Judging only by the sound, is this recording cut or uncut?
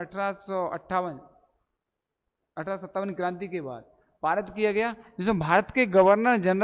uncut